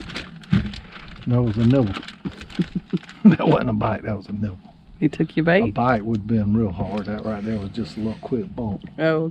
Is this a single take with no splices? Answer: yes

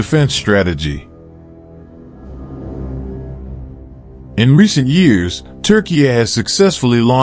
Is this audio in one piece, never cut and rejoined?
no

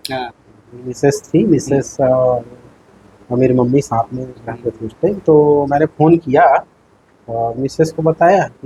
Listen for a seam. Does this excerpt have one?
no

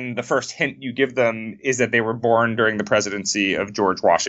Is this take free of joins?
yes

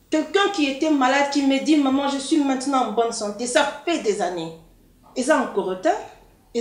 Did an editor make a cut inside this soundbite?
no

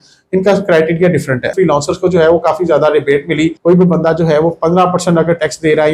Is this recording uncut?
no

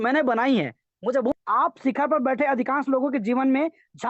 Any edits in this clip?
yes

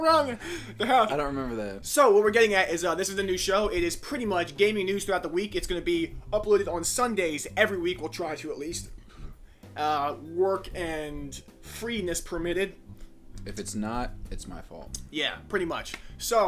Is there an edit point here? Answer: yes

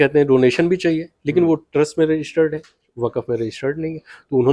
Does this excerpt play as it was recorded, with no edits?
yes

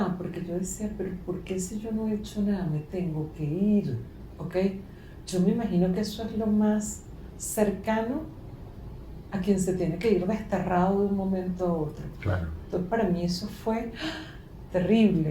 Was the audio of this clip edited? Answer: no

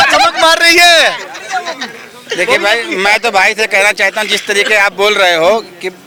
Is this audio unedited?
yes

